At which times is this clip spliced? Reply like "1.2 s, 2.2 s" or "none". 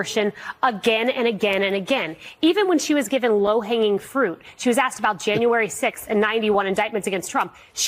none

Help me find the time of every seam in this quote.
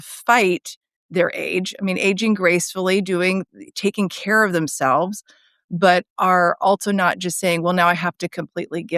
none

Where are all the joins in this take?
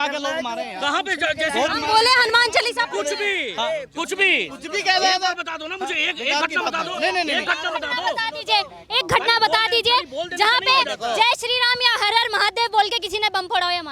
none

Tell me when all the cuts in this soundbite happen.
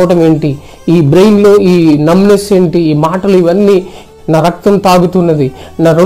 4.0 s

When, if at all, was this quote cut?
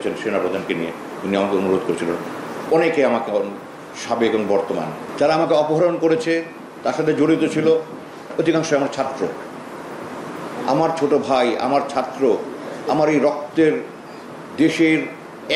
5.0 s

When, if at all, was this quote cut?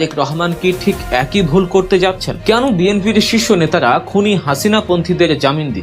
2.3 s

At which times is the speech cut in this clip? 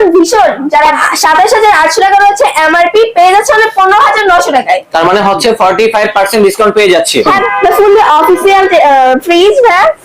1.0 s, 7.3 s

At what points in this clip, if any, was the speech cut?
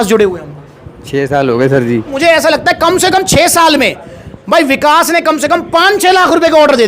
2.1 s

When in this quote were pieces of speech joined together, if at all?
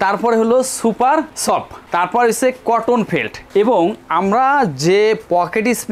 none

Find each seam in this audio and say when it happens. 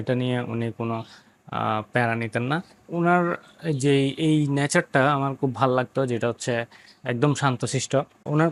none

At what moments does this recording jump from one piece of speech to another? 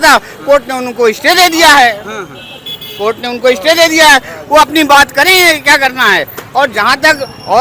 none

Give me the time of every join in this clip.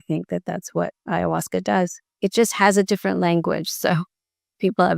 2.0 s

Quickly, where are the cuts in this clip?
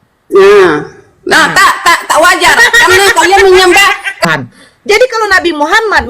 4.2 s

